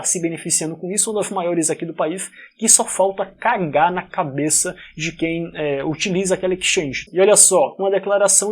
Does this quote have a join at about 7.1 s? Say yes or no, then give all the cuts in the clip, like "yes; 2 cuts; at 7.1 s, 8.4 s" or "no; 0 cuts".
yes; 1 cut; at 7.1 s